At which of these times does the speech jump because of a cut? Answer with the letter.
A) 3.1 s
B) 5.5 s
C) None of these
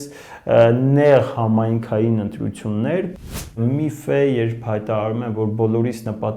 A